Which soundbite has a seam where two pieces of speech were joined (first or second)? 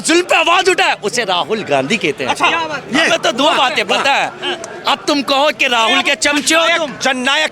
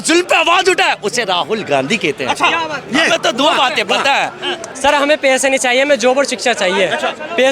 second